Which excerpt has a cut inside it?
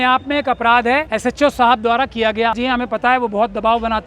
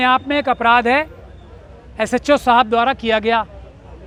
first; 2 cuts; at 1.1 s, 2.6 s

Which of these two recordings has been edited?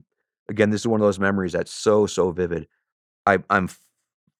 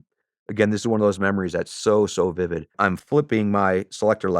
second; 1 cut; at 3.0 s

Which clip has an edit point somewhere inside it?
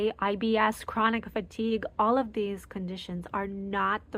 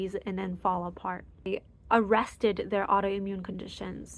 second; 1 cut; at 1.5 s

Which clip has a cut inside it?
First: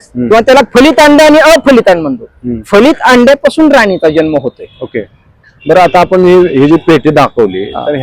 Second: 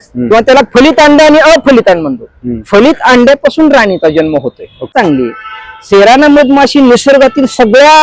second; 1 cut; at 4.9 s

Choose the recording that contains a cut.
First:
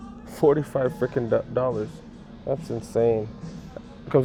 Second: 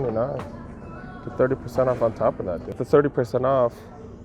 second; 1 cut; at 2.8 s

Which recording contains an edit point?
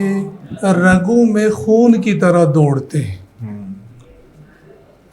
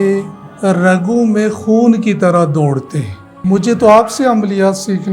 second; 1 cut; at 3.4 s

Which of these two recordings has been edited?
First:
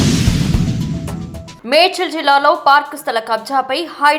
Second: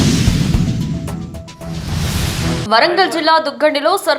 second; 2 cuts; at 1.5 s, 2.6 s

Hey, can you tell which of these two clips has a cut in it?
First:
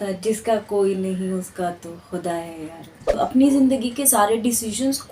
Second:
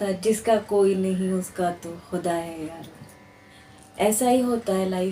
first; 1 cut; at 3.1 s

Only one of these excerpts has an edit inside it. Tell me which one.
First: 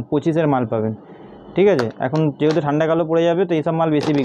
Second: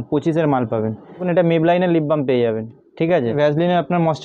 second; 2 cuts; at 1.3 s, 3.4 s

